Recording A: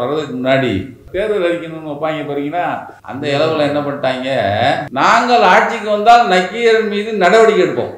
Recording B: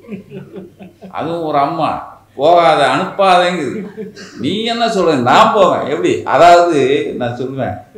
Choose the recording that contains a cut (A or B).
A